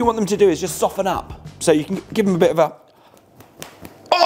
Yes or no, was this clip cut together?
no